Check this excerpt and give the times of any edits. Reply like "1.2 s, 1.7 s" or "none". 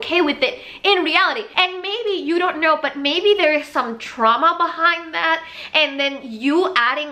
1.4 s

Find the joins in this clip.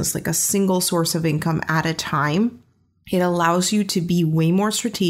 none

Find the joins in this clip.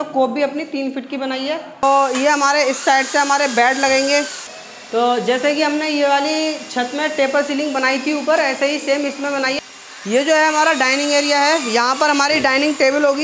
1.8 s, 4.4 s, 9.6 s

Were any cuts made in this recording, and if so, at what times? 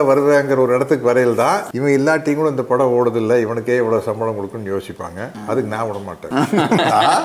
1.7 s

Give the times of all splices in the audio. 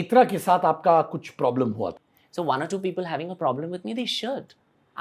1.9 s

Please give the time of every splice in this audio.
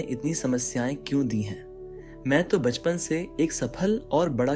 none

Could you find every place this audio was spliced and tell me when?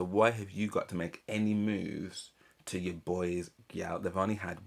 none

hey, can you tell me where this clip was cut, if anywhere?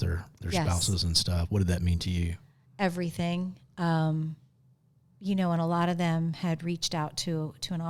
none

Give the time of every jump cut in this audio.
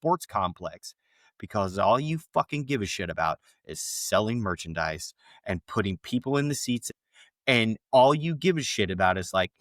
6.8 s

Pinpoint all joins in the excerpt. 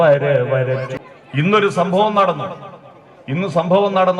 1.0 s

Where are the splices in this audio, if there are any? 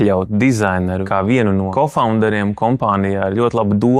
1.0 s, 1.7 s

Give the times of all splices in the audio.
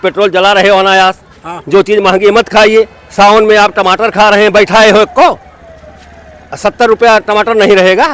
none

